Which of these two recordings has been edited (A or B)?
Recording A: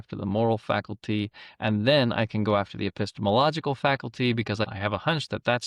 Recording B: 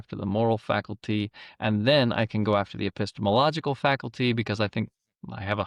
A